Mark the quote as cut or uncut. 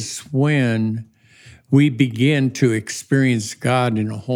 uncut